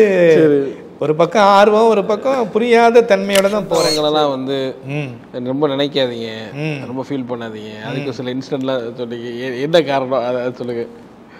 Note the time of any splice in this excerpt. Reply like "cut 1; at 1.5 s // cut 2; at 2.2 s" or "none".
cut 1; at 3.9 s

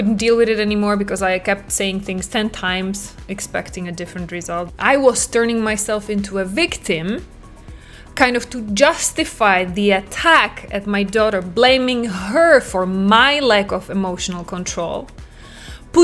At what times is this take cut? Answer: cut 1; at 4.7 s

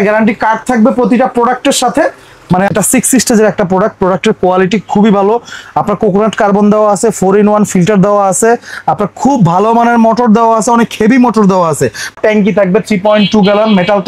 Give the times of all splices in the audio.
cut 1; at 2.7 s // cut 2; at 12.2 s

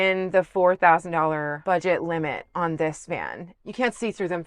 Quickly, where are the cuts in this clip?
cut 1; at 1.5 s // cut 2; at 3.5 s

